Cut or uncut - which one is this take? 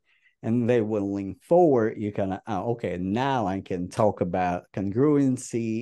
uncut